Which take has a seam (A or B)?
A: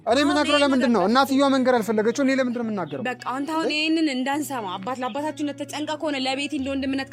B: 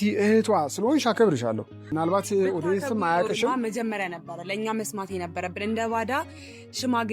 B